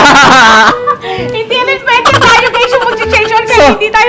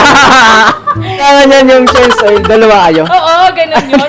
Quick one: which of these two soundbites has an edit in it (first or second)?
second